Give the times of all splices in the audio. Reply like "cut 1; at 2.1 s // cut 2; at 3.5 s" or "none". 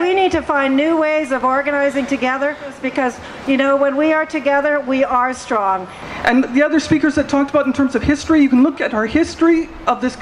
cut 1; at 2.8 s // cut 2; at 6.0 s